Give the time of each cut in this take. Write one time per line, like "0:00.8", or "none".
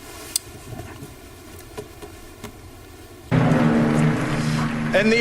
0:03.3